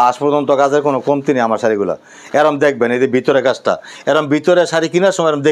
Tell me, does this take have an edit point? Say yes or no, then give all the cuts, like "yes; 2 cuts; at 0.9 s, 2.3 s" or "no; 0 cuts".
no; 0 cuts